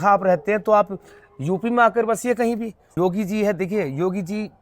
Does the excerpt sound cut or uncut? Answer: cut